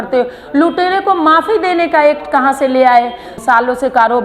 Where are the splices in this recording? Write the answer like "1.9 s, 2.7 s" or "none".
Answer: 3.3 s